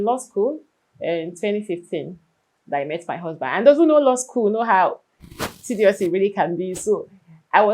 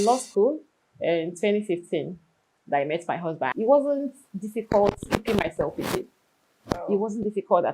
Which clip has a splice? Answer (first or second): second